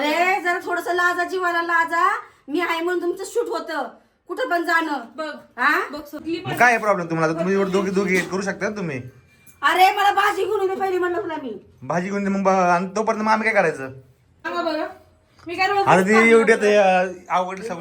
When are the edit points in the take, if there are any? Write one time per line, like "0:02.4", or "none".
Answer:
0:06.2
0:14.5

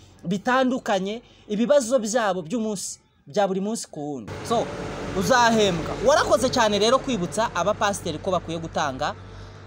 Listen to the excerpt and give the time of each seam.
0:04.3

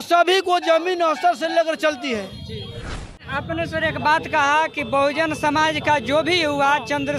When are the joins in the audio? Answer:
0:03.1

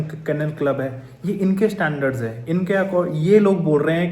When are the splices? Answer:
none

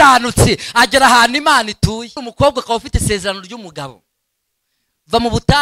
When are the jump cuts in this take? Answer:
0:02.2

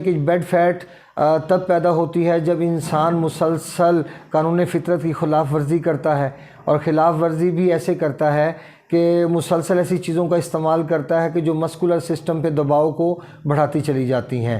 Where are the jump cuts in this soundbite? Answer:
none

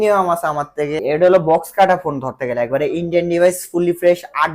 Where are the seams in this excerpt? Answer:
0:01.0

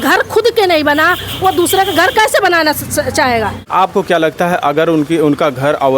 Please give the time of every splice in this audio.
0:03.6

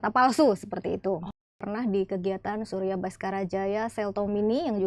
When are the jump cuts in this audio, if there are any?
0:01.6

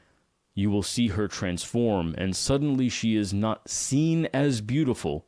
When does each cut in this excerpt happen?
none

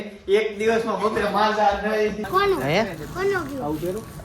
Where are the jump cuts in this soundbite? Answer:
0:02.2

